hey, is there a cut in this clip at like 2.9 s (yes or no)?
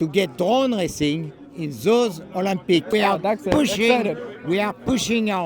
yes